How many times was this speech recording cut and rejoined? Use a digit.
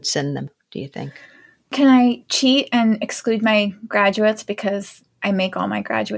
0